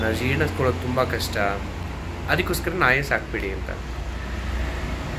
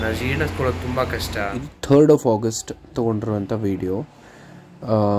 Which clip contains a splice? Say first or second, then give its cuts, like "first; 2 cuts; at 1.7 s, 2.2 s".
second; 1 cut; at 1.7 s